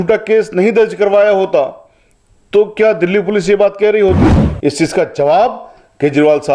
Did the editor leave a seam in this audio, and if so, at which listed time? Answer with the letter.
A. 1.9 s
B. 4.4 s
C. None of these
B